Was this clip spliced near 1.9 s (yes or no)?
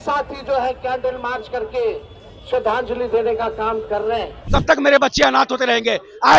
no